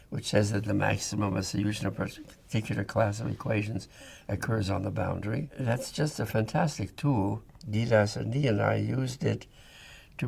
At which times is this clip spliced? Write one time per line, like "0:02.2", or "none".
0:05.5
0:07.6